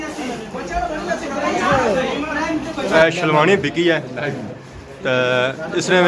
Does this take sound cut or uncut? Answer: cut